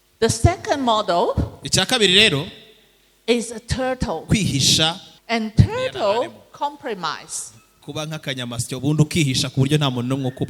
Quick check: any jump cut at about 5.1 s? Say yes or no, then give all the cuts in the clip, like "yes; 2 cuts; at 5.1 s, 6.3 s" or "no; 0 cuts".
yes; 1 cut; at 5.1 s